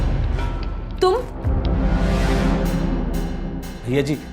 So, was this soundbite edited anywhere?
no; 0 cuts

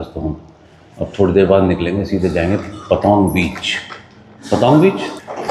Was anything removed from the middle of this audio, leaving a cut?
no; 0 cuts

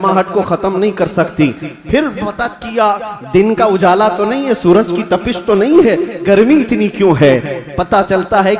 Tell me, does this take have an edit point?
no; 0 cuts

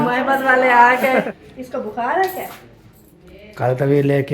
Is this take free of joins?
no; 1 cut; at 1.2 s

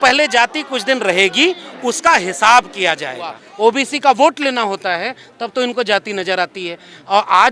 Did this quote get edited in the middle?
yes; 1 cut; at 3.4 s

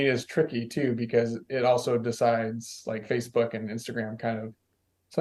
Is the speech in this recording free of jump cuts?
yes; 0 cuts

